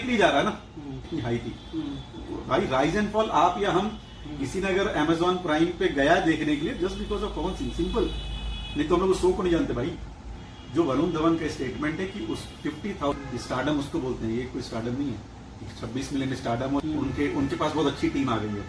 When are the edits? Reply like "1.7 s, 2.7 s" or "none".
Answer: 1.1 s, 10.4 s, 13.1 s, 16.8 s